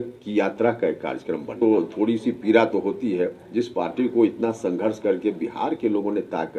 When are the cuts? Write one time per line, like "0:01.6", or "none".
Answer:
0:01.5